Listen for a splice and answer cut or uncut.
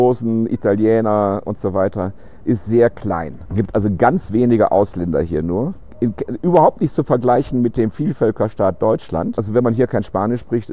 uncut